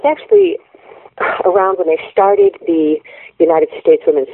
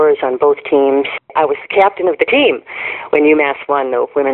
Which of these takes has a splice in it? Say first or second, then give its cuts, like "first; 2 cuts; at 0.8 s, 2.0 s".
second; 1 cut; at 1.3 s